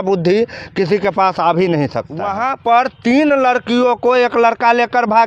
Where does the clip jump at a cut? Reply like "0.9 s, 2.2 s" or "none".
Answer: 2.2 s